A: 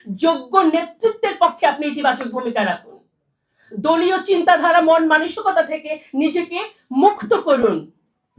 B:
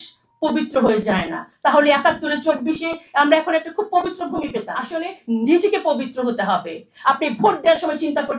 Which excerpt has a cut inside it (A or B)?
B